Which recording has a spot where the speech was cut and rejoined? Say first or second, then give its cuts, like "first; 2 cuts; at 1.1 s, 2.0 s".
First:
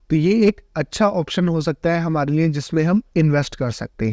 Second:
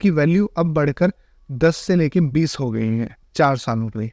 second; 1 cut; at 3.2 s